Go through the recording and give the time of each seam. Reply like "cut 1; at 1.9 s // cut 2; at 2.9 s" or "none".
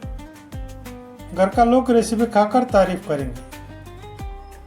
cut 1; at 3.4 s